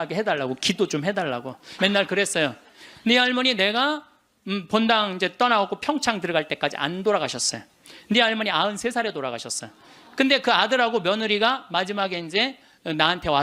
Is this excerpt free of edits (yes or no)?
no